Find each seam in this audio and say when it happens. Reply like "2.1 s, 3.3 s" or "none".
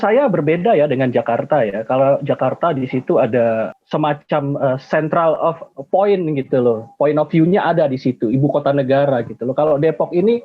3.7 s